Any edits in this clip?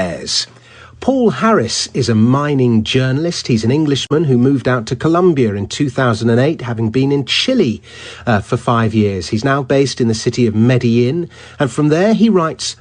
yes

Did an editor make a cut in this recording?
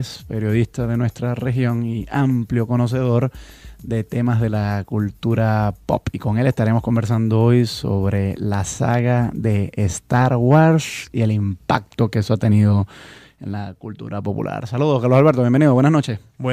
no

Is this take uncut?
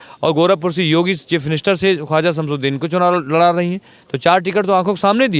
yes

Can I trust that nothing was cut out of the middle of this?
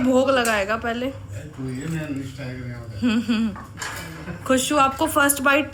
yes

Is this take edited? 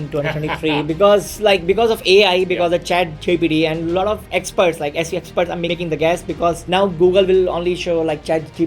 yes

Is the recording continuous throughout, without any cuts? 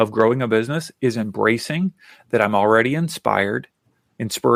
yes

